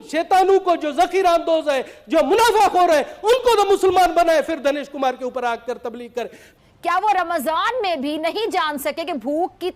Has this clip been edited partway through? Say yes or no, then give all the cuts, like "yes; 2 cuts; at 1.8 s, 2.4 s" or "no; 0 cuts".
yes; 1 cut; at 6.5 s